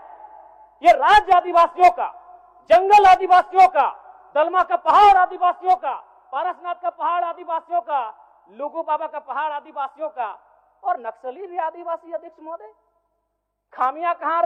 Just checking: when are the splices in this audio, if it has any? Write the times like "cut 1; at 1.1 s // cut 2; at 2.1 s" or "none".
none